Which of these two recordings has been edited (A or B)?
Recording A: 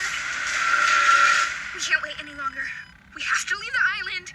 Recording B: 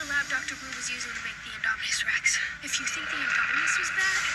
A